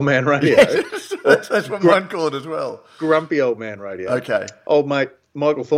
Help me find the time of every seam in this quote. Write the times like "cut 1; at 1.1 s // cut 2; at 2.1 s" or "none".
cut 1; at 4.5 s